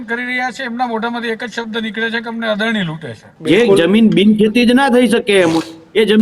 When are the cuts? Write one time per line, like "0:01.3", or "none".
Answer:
0:03.3